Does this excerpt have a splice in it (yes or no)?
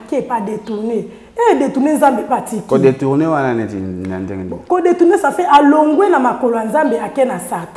no